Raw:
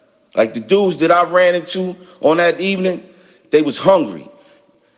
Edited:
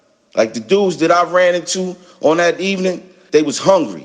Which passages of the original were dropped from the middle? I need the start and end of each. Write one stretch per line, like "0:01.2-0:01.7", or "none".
0:03.1-0:03.3